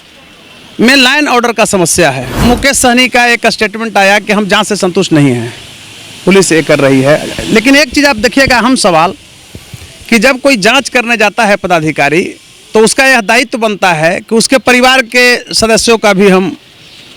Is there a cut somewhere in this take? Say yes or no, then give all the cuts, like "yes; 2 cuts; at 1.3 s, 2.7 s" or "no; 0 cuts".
yes; 1 cut; at 2.3 s